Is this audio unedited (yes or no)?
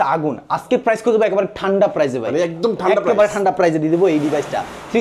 yes